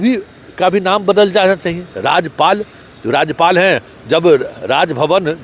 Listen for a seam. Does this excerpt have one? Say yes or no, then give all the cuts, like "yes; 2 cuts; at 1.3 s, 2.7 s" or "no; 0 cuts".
no; 0 cuts